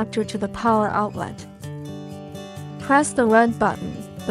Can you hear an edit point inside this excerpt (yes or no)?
yes